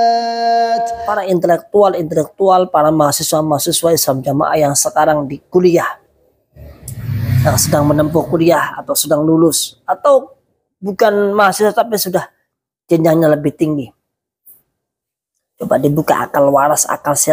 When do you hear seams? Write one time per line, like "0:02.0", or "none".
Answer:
0:01.1